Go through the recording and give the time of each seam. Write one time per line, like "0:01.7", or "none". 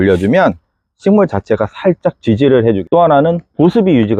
0:02.8